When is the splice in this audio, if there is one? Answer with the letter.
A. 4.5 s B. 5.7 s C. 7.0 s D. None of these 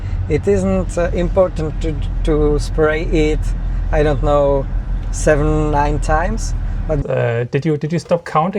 C